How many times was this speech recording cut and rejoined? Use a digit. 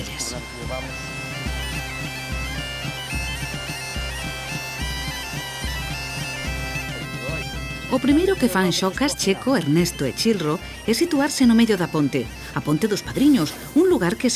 0